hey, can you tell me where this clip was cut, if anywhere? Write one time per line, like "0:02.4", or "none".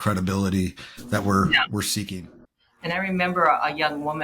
0:02.1